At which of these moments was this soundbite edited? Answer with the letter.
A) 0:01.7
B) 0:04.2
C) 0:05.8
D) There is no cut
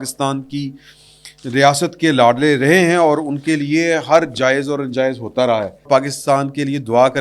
C